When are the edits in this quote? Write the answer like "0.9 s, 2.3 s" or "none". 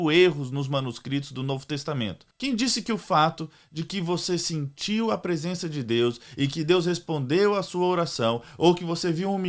2.2 s